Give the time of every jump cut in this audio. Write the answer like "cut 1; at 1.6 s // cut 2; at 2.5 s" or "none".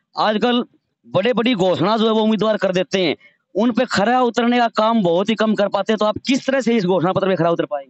none